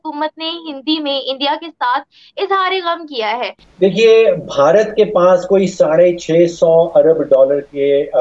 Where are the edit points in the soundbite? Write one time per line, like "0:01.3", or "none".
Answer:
0:03.6